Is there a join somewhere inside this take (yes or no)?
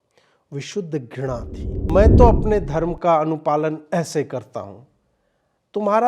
yes